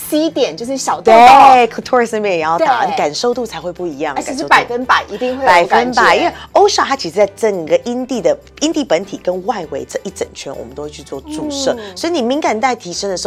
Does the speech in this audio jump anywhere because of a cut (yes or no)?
no